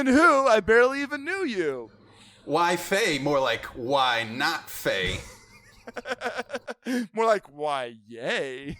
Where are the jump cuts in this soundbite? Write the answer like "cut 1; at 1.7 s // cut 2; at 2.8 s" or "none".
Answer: none